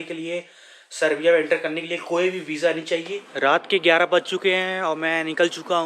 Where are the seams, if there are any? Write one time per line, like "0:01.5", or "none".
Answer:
0:03.2